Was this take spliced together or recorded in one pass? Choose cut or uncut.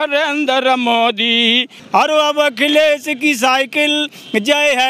cut